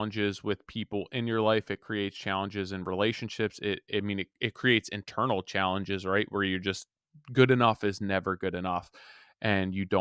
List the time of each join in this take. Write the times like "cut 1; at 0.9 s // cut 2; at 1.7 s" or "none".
none